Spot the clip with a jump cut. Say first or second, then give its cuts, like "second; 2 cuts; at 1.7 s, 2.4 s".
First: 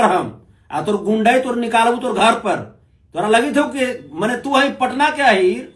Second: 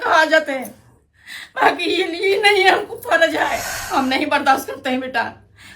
second; 1 cut; at 3.7 s